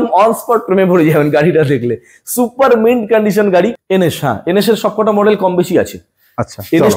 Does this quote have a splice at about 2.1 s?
no; 1 cut; at 3.8 s

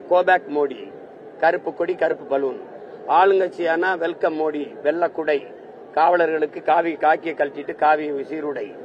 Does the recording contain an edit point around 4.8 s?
no; 0 cuts

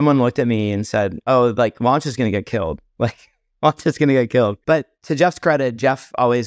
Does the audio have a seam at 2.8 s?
no; 1 cut; at 4.6 s

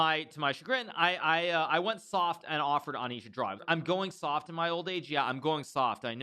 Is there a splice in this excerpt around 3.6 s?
yes; 1 cut; at 3.6 s

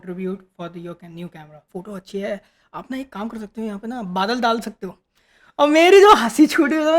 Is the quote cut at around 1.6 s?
yes; 1 cut; at 1.6 s

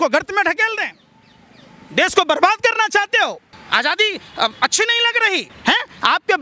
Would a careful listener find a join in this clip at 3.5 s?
yes; 2 cuts; at 3.5 s, 5.5 s

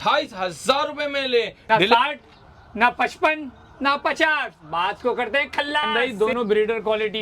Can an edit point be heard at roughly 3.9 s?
no; 2 cuts; at 1.6 s, 5.9 s

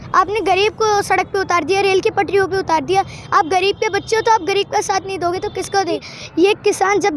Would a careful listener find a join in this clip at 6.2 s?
yes; 1 cut; at 6.2 s

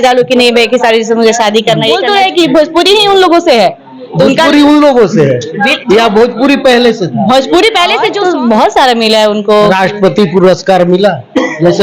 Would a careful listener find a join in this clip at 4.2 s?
no; 2 cuts; at 2.0 s, 8.1 s

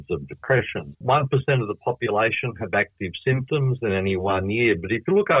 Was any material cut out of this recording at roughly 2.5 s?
no; 1 cut; at 1.0 s

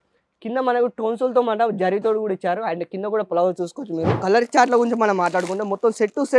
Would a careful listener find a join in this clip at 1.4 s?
no; 1 cut; at 4.2 s

